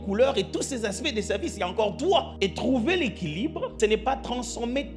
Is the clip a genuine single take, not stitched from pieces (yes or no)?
no